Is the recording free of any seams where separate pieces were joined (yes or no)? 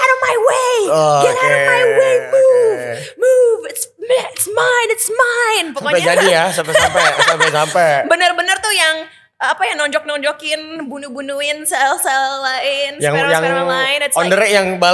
yes